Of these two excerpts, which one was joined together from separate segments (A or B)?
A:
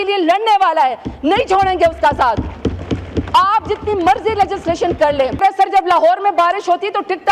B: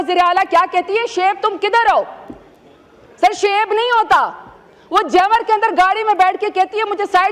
A